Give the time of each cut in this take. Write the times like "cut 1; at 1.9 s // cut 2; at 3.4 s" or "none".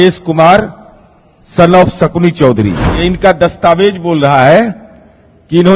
cut 1; at 2.9 s